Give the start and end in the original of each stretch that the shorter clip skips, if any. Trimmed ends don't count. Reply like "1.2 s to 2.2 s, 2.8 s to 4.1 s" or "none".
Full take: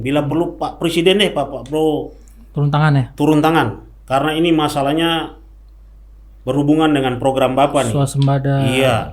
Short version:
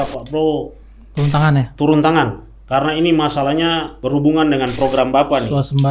5.3 s to 6.4 s